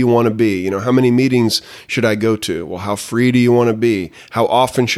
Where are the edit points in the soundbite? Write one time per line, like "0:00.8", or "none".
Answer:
none